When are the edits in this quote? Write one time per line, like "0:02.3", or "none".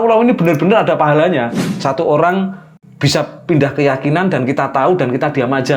0:01.6